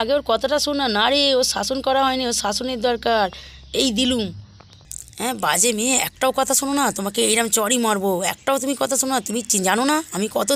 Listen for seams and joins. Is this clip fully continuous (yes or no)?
yes